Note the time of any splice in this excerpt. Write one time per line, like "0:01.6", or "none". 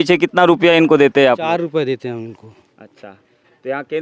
none